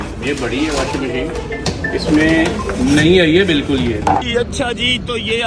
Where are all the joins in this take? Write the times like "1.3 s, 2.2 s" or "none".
4.2 s

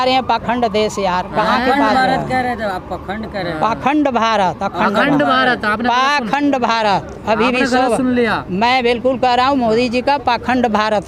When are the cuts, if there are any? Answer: none

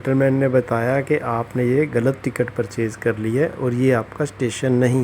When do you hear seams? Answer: 3.6 s

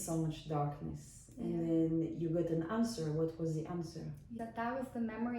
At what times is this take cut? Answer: 4.3 s

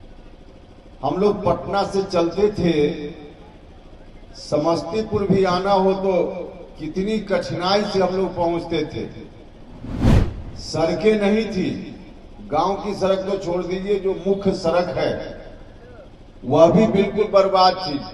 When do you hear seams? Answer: none

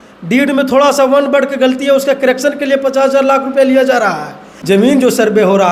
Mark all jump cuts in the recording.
4.5 s

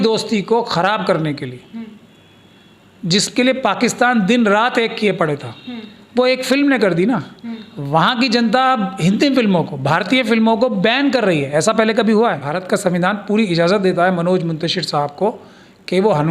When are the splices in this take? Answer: 12.5 s

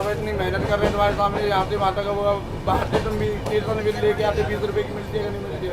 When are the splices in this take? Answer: none

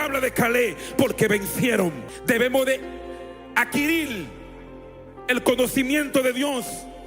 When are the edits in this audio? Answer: 2.1 s

